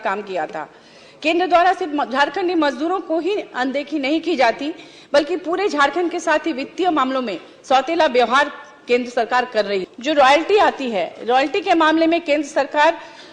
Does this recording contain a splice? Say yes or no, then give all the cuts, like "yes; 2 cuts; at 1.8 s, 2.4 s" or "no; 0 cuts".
yes; 1 cut; at 9.9 s